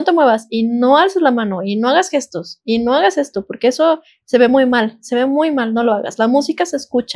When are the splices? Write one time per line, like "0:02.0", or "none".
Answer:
none

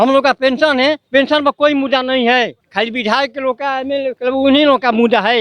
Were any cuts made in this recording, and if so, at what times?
0:01.0
0:02.6
0:04.2

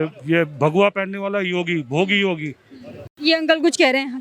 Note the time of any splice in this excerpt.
0:02.9

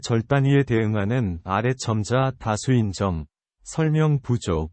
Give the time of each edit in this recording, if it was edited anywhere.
none

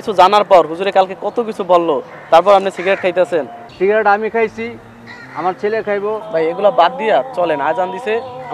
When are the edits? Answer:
0:03.6
0:06.2

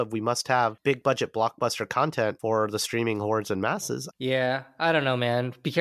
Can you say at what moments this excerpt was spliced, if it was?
0:00.8
0:02.4
0:04.1

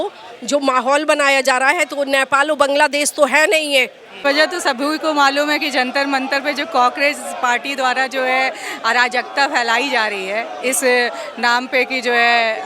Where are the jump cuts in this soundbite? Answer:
0:04.2

